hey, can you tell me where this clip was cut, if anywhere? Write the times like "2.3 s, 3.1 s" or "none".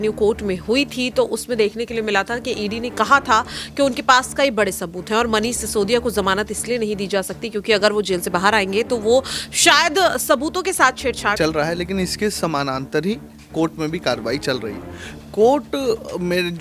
11.4 s